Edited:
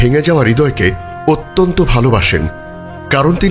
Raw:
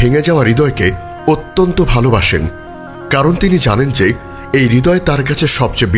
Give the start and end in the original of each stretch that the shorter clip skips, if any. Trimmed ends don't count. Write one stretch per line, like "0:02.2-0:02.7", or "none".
none